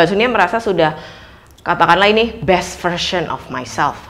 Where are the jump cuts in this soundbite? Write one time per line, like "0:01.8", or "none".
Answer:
none